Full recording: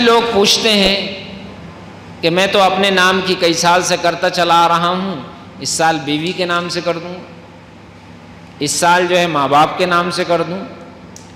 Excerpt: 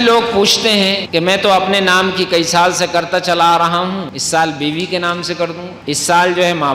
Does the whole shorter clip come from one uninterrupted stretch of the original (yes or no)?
no